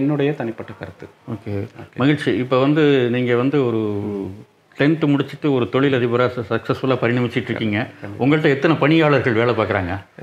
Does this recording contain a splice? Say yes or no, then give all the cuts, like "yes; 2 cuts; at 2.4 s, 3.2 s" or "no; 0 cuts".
no; 0 cuts